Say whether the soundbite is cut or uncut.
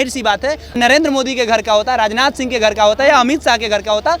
cut